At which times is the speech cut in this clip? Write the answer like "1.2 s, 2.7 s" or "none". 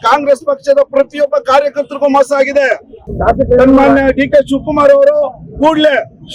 3.1 s